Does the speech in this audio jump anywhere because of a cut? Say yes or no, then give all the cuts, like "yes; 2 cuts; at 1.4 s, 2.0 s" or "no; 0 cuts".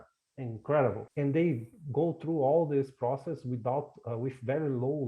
yes; 1 cut; at 1.0 s